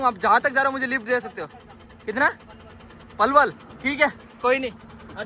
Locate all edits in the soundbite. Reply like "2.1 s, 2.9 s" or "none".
none